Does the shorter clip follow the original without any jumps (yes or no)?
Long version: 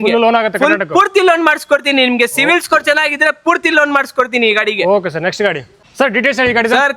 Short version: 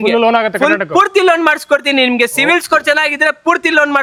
yes